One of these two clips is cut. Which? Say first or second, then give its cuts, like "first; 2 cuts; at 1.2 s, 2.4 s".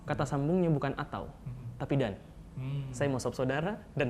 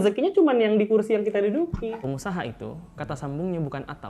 second; 1 cut; at 2.0 s